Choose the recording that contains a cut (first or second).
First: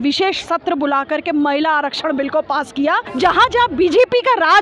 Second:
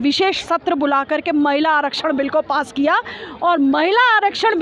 first